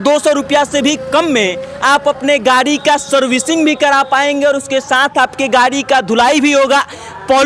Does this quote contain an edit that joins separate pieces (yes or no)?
no